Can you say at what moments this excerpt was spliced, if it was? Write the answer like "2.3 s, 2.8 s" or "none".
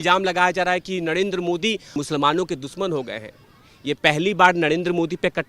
2.0 s